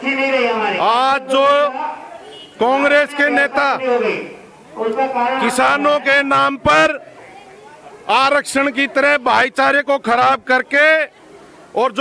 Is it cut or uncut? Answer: uncut